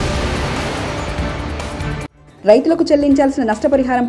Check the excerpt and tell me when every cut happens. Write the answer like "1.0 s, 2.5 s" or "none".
2.1 s